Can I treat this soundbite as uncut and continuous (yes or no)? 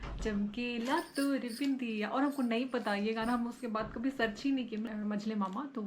no